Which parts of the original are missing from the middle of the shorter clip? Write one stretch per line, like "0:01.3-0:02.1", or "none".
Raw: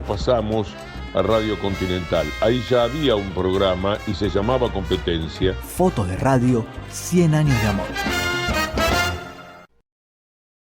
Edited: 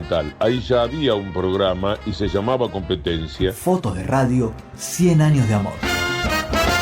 0:05.6-0:05.7
0:07.9-0:08.0